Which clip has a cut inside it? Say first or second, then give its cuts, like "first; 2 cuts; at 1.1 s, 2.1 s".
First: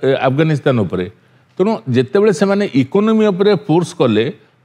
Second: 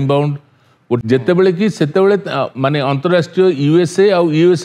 second; 1 cut; at 1.0 s